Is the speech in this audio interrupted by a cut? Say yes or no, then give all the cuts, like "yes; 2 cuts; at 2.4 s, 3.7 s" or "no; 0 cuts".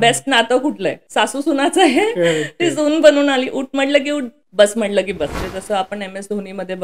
yes; 3 cuts; at 1.0 s, 4.4 s, 5.4 s